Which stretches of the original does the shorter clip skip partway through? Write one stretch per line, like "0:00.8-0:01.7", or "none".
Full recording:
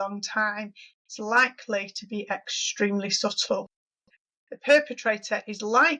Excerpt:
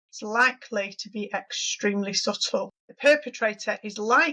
0:03.8-0:04.5